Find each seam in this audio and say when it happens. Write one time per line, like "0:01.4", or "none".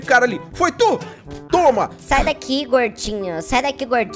0:02.0